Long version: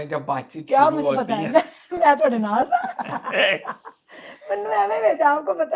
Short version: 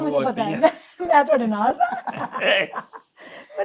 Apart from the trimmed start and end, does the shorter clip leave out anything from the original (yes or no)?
no